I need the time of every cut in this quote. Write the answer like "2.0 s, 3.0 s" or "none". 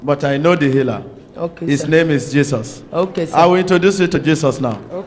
4.2 s